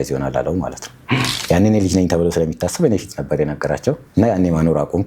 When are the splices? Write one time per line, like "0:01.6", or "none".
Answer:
0:04.0